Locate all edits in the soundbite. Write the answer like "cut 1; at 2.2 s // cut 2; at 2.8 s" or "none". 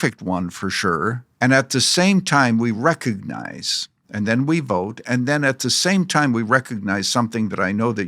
cut 1; at 1.3 s

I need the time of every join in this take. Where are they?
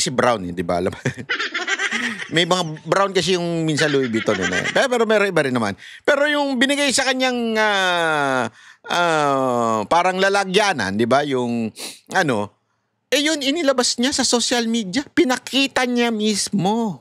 none

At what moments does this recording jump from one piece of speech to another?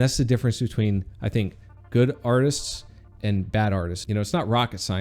cut 1; at 4.0 s

